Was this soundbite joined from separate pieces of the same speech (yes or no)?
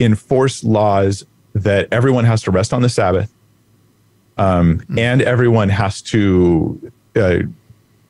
no